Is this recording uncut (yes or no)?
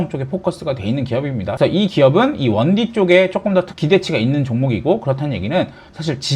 no